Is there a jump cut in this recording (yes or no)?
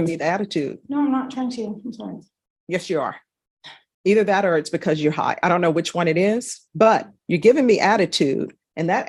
no